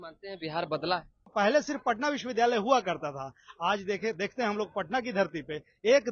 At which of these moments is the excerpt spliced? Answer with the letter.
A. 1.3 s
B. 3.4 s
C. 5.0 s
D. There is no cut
A